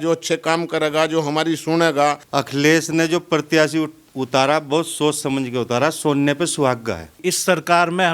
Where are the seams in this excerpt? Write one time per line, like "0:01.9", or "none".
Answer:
0:02.2
0:07.1